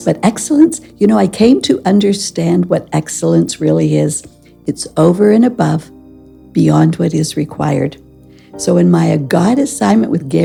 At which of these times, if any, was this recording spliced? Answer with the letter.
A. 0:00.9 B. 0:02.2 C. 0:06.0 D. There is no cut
D